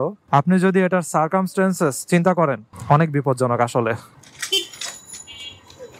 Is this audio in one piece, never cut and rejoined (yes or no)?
no